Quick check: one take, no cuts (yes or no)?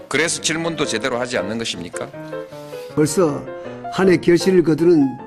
no